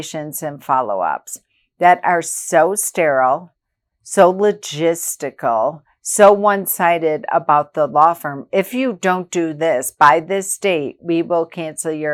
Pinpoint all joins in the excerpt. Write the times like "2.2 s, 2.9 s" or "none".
none